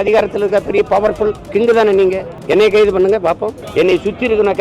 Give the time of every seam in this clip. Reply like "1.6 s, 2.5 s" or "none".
1.4 s, 2.3 s, 3.6 s